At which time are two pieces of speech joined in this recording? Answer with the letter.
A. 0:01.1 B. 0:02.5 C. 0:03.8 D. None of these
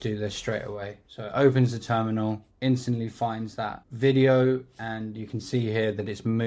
C